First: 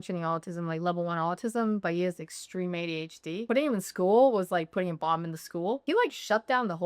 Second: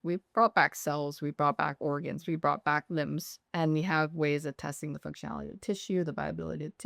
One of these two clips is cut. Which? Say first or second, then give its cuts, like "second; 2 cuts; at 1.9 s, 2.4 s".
first; 2 cuts; at 3.4 s, 5.8 s